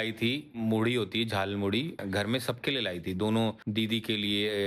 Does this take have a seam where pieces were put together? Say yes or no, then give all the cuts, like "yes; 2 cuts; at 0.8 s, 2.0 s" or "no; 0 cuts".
yes; 1 cut; at 2.0 s